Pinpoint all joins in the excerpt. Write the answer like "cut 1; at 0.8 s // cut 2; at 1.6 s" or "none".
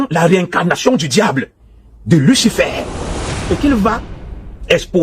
cut 1; at 3.3 s